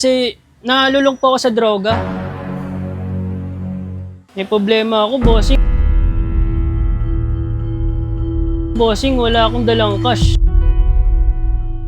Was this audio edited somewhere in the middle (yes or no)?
yes